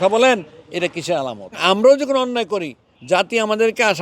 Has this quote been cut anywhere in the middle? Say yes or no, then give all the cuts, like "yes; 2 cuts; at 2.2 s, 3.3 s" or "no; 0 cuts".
yes; 1 cut; at 1.6 s